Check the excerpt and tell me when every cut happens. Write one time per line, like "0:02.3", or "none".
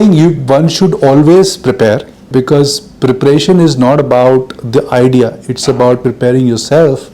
0:02.3
0:06.0